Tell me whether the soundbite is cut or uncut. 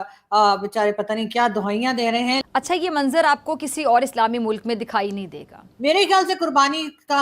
cut